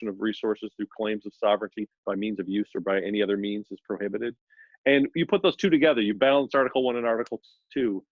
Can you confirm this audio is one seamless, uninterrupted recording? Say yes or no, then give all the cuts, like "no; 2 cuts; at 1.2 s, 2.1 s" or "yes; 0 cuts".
yes; 0 cuts